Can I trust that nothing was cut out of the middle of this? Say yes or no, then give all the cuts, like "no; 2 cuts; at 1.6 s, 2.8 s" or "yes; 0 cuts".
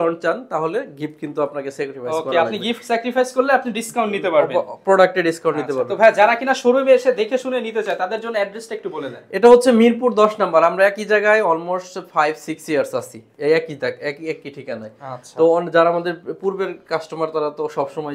yes; 0 cuts